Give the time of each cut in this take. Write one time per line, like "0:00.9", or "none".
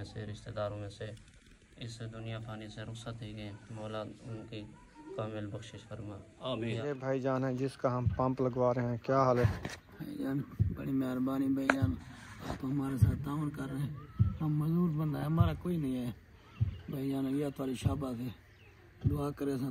0:06.8